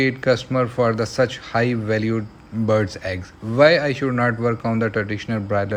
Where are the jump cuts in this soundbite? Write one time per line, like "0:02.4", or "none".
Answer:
none